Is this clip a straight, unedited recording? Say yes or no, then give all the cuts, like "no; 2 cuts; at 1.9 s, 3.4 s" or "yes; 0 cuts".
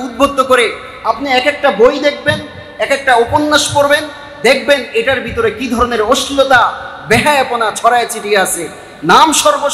yes; 0 cuts